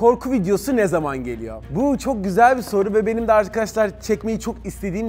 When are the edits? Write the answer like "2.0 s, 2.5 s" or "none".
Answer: none